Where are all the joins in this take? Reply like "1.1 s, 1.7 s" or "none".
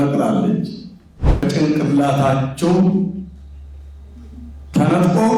1.4 s